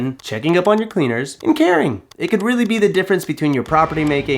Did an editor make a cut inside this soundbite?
yes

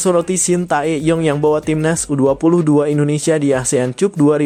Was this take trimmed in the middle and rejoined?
no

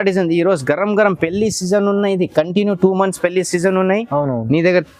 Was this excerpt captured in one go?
yes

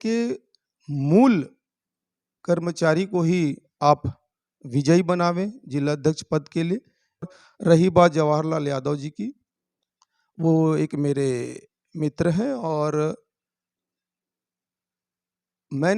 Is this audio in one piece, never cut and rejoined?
no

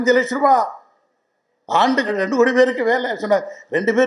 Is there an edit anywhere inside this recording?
yes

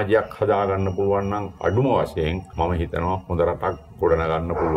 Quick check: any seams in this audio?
no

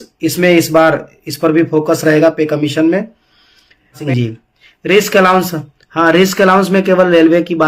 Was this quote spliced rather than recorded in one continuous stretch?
yes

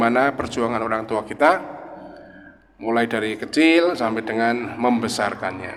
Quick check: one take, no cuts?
yes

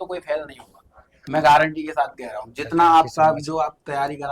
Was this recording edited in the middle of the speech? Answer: no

